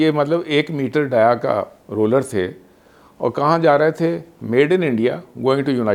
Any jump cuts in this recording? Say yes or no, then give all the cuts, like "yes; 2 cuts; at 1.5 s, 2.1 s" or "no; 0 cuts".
no; 0 cuts